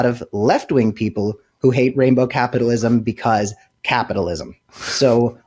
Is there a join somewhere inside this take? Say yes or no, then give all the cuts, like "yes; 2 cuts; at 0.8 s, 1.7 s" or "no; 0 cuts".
no; 0 cuts